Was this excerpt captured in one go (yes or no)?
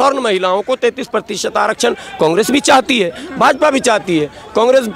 yes